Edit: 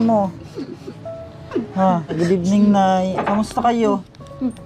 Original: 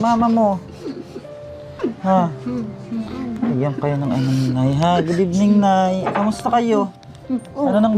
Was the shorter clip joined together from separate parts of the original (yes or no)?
yes